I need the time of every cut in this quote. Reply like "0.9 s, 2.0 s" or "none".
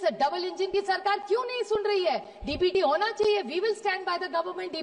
none

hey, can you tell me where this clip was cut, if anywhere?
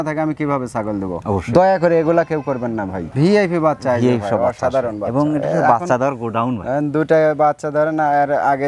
3.0 s

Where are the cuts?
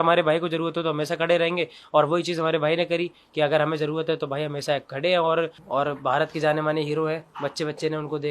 5.6 s

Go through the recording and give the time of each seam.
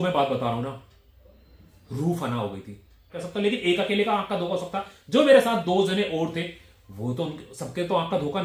3.1 s

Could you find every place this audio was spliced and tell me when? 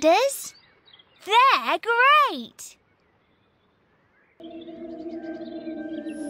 4.4 s

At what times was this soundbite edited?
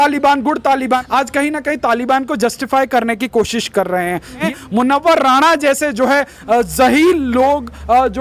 1.0 s, 4.4 s

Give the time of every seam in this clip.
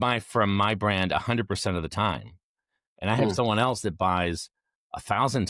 none

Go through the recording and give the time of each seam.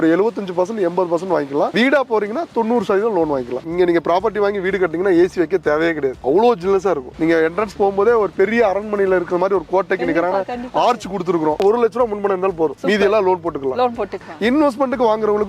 3.6 s, 7.1 s, 11.6 s, 14.2 s

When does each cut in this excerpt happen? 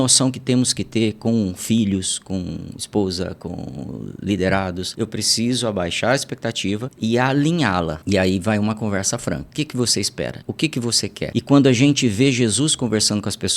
4.9 s, 6.9 s, 8.0 s, 9.5 s, 10.4 s, 11.3 s

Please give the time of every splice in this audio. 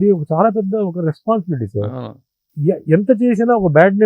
2.5 s

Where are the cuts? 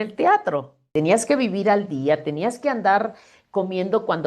0.9 s

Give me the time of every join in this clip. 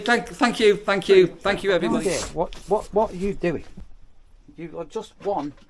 1.8 s

